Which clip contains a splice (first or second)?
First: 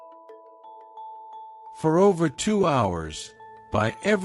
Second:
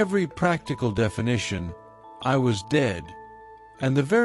first